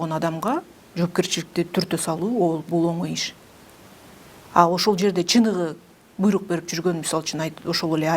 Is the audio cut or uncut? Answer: uncut